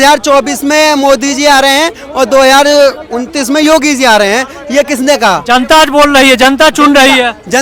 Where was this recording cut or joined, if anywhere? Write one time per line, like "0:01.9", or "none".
none

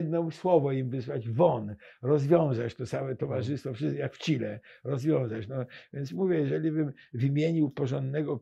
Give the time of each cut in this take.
none

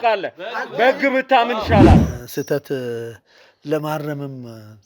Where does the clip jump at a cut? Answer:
0:02.2

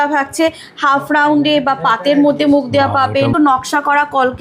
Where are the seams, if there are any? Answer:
0:03.3

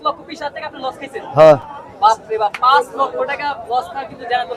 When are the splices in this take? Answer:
none

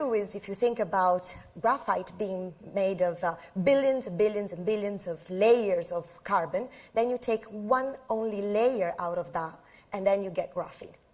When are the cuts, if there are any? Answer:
0:09.2

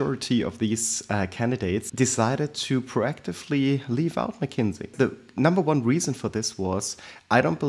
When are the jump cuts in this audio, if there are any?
0:01.9
0:04.9

